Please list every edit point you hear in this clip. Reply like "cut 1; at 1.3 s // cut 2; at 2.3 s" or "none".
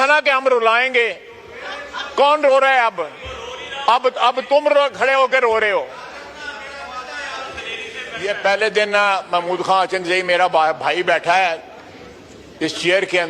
cut 1; at 8.1 s